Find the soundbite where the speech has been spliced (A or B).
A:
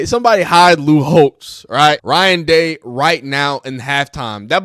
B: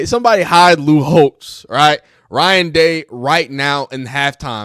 A